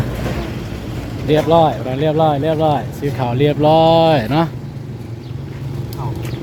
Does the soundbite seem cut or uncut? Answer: uncut